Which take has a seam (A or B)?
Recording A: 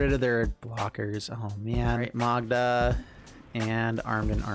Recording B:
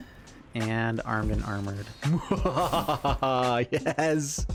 A